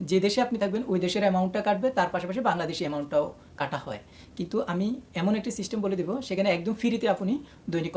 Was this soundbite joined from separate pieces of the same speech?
no; 0 cuts

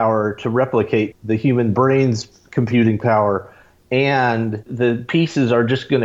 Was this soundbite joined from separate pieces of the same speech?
yes; 2 cuts; at 1.1 s, 4.7 s

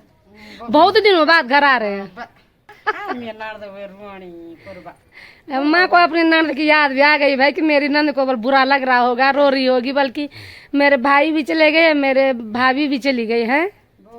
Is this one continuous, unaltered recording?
no; 1 cut; at 2.8 s

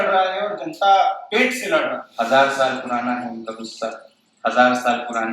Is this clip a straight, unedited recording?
no; 1 cut; at 2.0 s

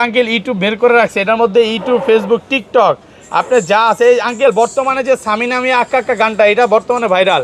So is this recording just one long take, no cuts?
yes; 0 cuts

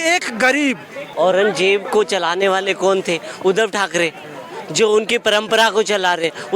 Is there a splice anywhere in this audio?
yes; 1 cut; at 1.1 s

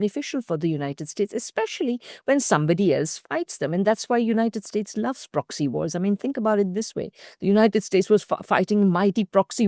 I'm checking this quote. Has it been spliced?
no; 0 cuts

